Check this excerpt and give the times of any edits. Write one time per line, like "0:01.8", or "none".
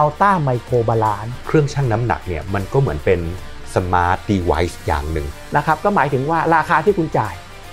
0:01.3
0:05.2